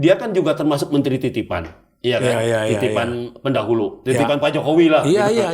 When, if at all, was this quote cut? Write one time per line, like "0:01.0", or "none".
none